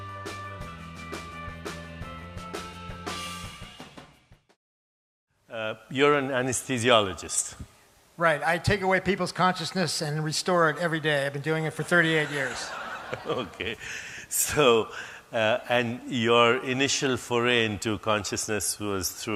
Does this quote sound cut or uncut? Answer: uncut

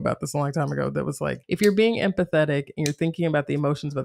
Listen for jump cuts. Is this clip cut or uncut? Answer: cut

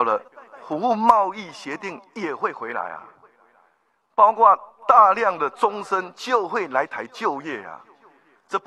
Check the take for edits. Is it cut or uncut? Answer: uncut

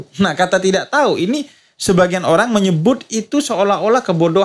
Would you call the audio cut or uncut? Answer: uncut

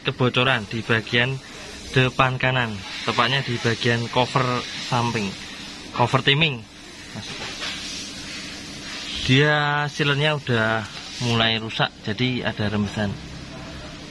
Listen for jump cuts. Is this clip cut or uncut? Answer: uncut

